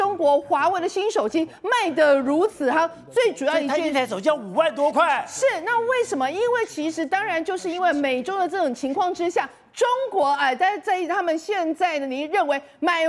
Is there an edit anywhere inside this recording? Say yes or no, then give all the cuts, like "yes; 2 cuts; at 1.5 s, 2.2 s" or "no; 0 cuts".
no; 0 cuts